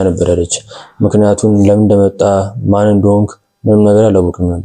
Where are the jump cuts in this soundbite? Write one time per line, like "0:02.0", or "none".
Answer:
none